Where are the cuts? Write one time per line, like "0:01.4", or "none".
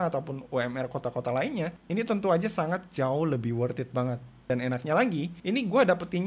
0:04.5